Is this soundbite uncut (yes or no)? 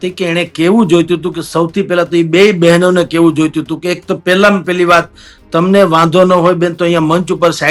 yes